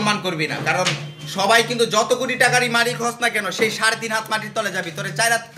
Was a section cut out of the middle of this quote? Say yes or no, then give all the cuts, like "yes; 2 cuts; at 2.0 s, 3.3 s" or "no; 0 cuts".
no; 0 cuts